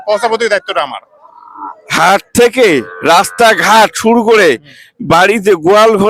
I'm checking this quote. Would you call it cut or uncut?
uncut